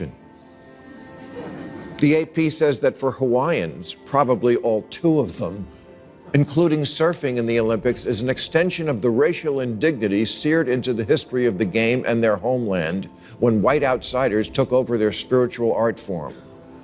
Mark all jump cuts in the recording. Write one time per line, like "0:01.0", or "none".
none